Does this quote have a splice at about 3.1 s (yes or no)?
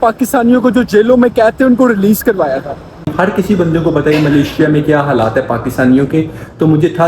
yes